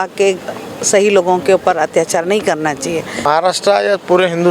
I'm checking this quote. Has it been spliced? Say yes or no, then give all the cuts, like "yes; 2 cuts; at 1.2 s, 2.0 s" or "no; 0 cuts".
yes; 1 cut; at 3.2 s